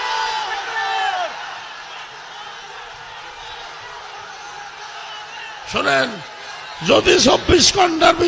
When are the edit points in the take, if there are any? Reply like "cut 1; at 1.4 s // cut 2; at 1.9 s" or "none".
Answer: none